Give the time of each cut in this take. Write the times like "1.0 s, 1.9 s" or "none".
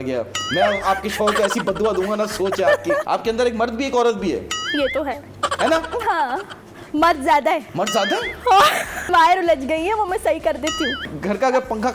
3.0 s, 7.7 s, 9.1 s, 11.1 s